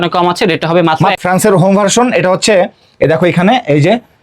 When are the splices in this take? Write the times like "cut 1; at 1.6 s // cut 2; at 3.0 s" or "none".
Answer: cut 1; at 1.3 s